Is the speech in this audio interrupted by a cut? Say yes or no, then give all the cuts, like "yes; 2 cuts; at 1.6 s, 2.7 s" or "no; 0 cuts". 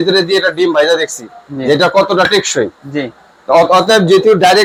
no; 0 cuts